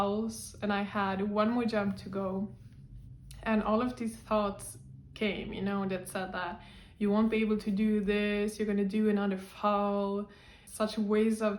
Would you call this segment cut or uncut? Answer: uncut